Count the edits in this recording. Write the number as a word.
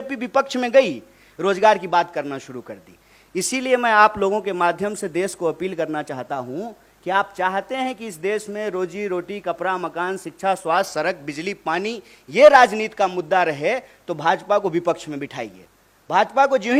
zero